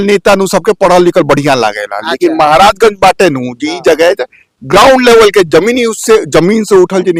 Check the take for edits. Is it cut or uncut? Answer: uncut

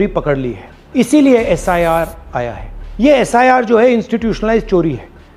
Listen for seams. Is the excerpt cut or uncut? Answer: uncut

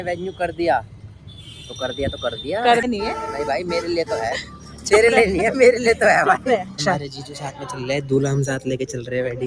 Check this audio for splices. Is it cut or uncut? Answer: cut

